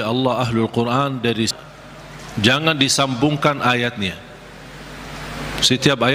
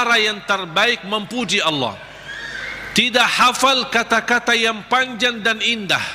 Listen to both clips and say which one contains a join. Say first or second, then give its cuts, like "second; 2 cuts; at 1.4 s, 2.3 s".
first; 1 cut; at 1.5 s